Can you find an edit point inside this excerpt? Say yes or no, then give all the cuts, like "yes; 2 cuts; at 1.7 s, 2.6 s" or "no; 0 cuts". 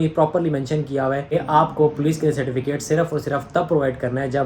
yes; 1 cut; at 1.3 s